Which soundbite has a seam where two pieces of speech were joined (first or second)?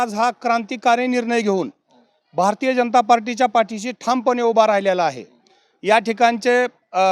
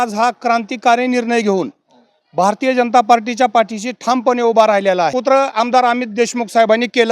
second